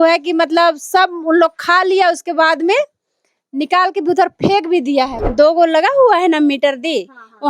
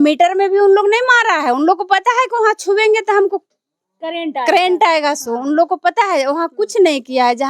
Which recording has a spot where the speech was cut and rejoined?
first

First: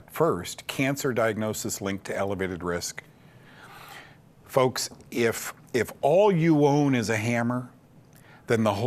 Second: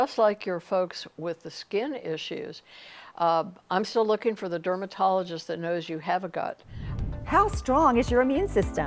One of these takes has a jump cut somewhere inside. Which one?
second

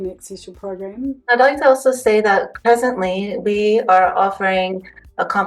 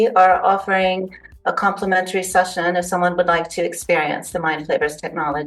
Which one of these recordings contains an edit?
first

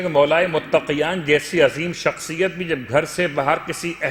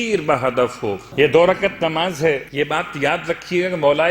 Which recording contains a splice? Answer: second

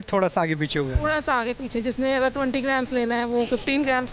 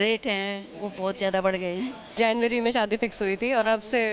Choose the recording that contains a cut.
second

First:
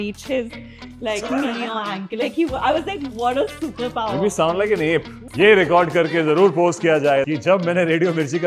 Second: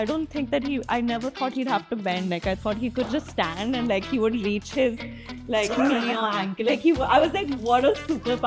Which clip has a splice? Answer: first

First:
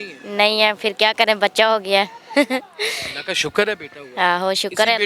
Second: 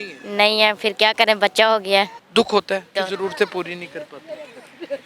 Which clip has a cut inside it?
second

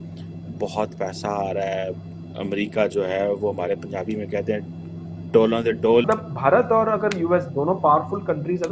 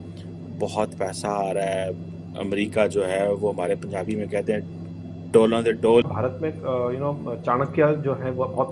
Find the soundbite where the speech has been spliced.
second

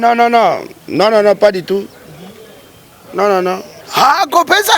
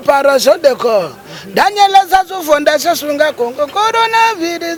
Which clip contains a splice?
first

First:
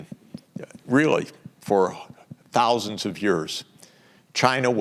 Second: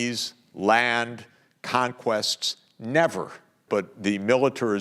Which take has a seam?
second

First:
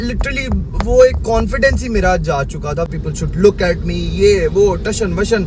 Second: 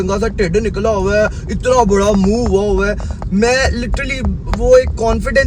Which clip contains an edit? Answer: first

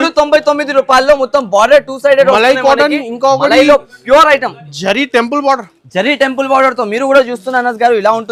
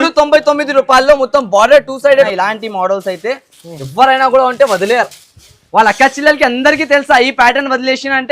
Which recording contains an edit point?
second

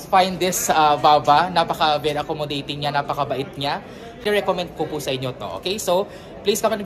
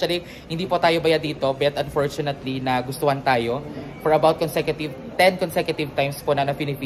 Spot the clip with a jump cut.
first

